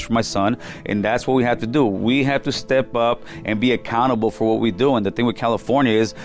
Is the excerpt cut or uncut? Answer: uncut